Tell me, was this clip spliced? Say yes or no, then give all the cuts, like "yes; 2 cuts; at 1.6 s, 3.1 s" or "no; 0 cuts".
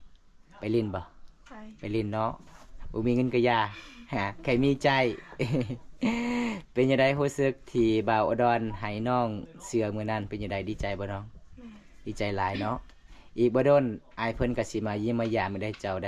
no; 0 cuts